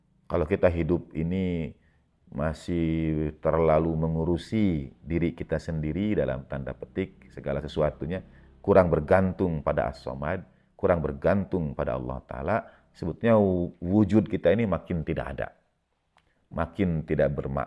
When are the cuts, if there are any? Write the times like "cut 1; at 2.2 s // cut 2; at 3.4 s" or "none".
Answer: none